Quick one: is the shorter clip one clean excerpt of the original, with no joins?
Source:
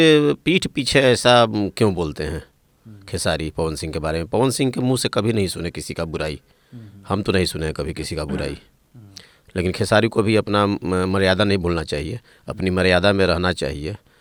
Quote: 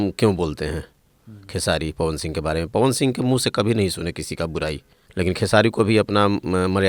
no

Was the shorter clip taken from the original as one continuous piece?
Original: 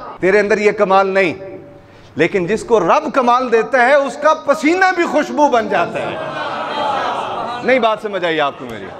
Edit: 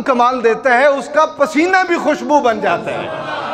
yes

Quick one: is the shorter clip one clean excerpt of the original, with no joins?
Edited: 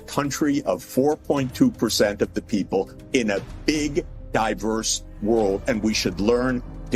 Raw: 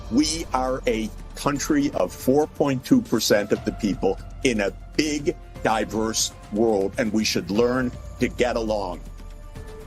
yes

